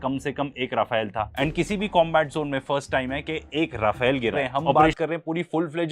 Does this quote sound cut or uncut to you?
cut